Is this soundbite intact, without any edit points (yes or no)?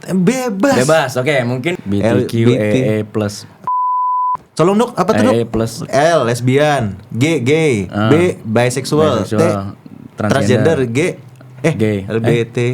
no